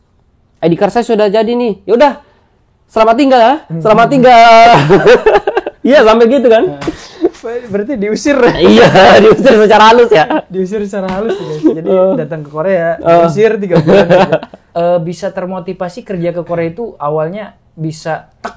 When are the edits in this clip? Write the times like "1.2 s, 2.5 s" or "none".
14.6 s